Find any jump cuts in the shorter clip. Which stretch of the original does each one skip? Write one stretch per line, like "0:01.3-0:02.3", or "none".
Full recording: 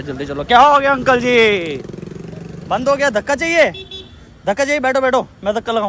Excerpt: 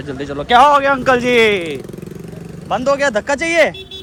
none